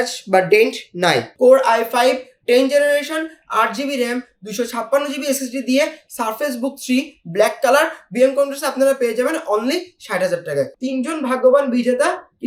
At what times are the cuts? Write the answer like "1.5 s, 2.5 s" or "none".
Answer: 1.3 s, 10.8 s